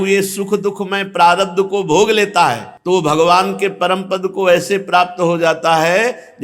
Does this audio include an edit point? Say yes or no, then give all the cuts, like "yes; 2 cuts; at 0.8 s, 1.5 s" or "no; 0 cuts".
yes; 1 cut; at 2.7 s